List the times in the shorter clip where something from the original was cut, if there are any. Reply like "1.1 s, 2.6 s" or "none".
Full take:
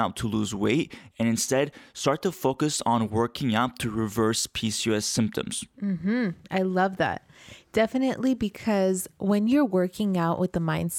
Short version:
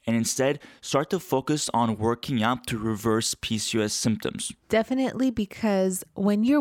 4.5 s